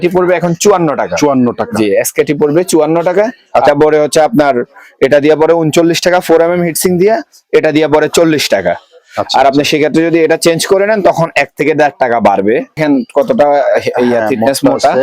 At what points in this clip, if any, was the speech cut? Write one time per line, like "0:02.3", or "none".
0:03.7
0:12.8